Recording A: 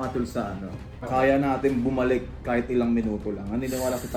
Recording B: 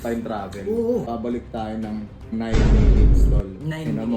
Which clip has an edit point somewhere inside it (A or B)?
B